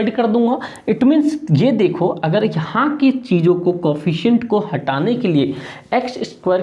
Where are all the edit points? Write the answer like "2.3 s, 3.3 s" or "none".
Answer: none